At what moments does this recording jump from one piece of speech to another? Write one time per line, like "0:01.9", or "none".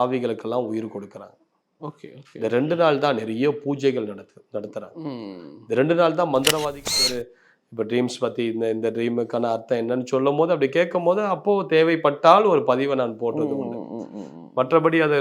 0:07.0